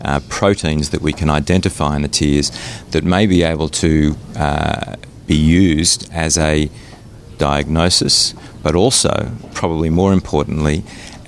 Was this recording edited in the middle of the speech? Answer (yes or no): no